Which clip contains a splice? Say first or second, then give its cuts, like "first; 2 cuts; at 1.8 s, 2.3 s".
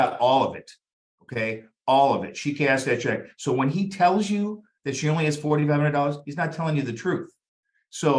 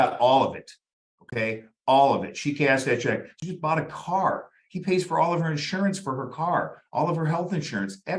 second; 1 cut; at 3.4 s